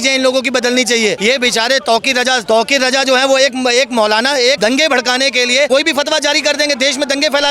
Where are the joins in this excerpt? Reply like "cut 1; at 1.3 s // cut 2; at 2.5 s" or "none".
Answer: cut 1; at 1.2 s // cut 2; at 2.4 s // cut 3; at 4.6 s // cut 4; at 5.7 s